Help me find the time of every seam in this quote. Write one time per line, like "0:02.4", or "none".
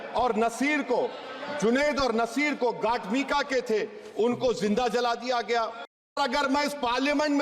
0:06.2